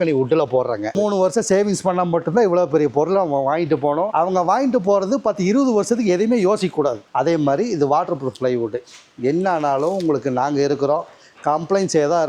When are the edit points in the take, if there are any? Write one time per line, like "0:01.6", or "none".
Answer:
0:00.9
0:04.1
0:07.0

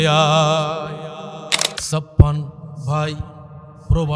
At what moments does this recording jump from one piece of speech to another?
0:01.8

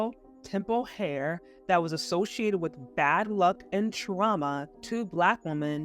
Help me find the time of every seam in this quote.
0:04.7

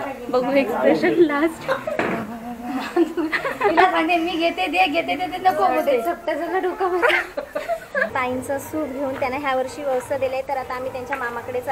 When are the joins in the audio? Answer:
0:08.1

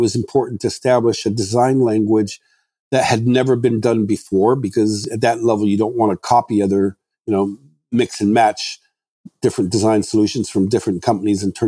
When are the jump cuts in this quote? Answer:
none

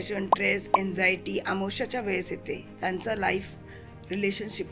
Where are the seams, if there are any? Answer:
0:02.7

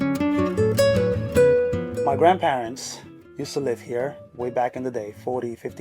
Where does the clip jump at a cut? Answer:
0:01.8

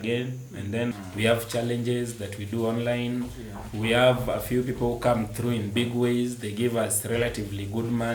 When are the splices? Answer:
0:00.9

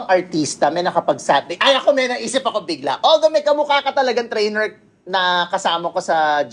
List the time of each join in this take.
none

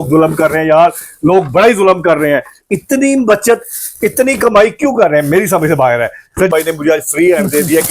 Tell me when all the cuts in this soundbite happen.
0:06.5

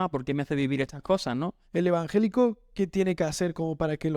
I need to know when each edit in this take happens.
0:01.6

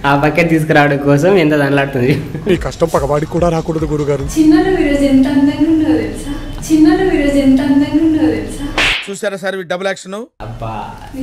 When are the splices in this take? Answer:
none

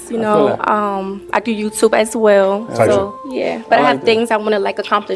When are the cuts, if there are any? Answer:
none

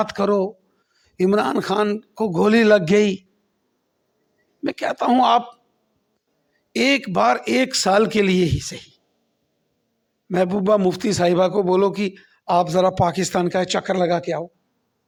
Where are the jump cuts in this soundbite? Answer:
none

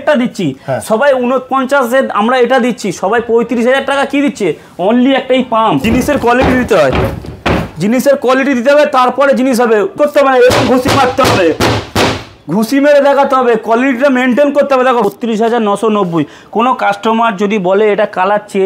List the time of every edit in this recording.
0:05.8
0:10.0
0:15.1

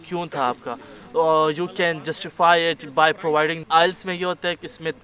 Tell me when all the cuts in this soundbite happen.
0:03.6

